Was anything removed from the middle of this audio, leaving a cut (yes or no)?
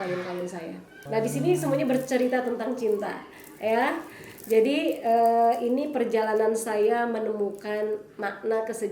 yes